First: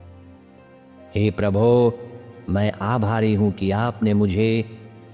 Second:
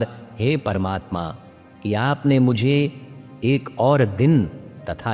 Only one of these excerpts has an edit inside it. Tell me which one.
first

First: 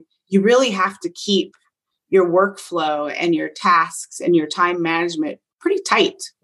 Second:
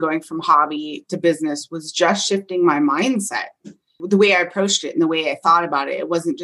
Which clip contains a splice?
second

